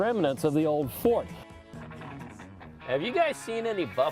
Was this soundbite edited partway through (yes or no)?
yes